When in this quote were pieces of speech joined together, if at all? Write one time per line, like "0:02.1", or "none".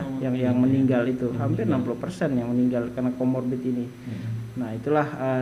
none